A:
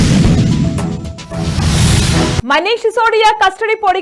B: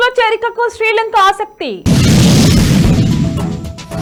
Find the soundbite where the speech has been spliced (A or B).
A